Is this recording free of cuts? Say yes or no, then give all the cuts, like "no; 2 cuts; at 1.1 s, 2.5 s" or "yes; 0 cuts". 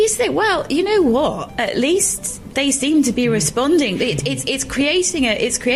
yes; 0 cuts